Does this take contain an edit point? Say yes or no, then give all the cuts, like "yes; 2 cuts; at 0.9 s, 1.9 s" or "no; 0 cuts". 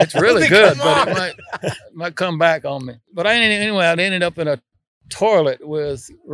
yes; 1 cut; at 3.0 s